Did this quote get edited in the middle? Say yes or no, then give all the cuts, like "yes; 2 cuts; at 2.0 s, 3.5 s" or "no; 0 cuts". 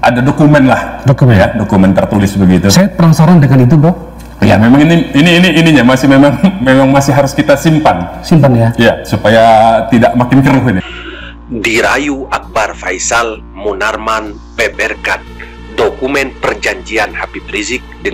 yes; 1 cut; at 10.9 s